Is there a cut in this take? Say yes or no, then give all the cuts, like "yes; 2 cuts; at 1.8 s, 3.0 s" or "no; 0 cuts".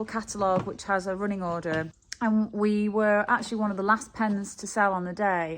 yes; 1 cut; at 2.0 s